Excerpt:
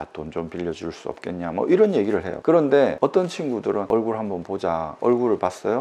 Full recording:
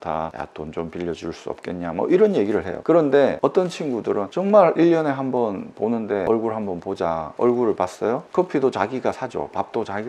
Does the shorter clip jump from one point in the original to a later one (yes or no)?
yes